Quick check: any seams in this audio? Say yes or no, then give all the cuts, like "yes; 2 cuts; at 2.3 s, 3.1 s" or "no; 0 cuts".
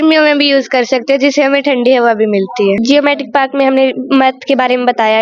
yes; 1 cut; at 2.8 s